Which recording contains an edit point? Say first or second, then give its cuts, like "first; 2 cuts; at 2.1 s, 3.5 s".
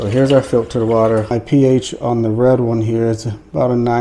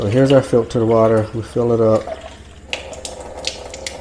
first; 1 cut; at 1.3 s